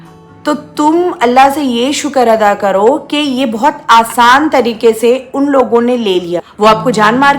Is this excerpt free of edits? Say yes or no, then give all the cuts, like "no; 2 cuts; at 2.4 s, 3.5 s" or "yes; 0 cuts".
no; 1 cut; at 6.5 s